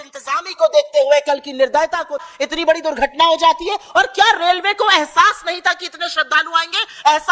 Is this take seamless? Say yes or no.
no